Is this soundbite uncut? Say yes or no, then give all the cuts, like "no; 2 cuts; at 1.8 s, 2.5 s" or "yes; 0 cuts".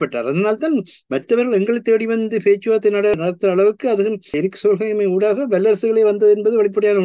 no; 2 cuts; at 3.1 s, 4.4 s